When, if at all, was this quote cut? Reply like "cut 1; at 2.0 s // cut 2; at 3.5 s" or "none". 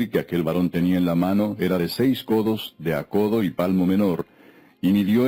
none